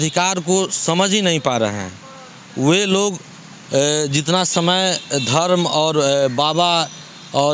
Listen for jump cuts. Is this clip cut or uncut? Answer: uncut